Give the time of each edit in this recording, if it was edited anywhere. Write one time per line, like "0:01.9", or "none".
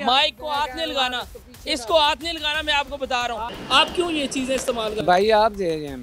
0:01.3
0:03.5